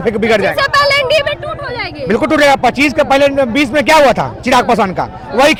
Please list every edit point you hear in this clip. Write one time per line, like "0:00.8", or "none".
none